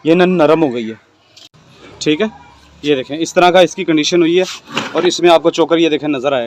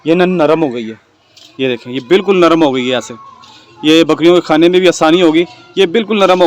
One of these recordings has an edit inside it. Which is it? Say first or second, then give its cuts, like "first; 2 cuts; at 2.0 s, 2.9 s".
first; 1 cut; at 1.4 s